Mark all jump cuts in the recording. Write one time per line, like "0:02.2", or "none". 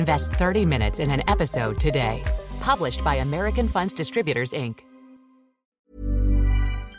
0:05.8